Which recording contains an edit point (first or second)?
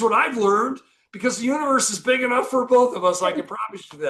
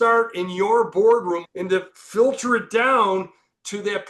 second